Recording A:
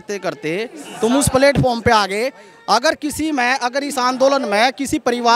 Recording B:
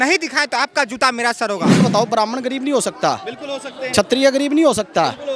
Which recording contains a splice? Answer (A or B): B